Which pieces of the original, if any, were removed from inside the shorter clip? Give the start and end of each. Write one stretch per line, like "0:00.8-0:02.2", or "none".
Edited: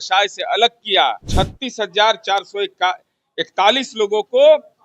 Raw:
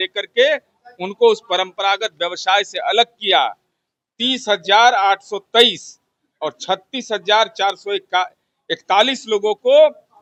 0:03.6-0:06.6